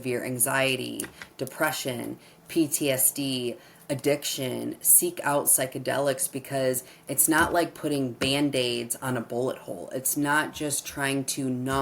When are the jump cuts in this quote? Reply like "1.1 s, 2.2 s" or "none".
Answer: none